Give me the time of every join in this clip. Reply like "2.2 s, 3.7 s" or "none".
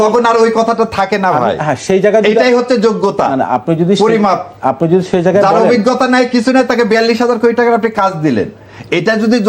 none